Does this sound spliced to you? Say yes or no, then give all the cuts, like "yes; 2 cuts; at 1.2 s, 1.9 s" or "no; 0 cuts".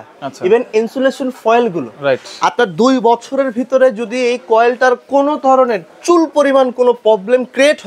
no; 0 cuts